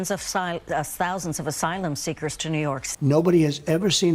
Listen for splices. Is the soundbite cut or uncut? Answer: cut